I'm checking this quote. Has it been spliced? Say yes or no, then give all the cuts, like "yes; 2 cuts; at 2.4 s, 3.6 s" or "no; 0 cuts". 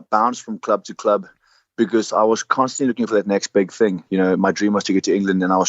no; 0 cuts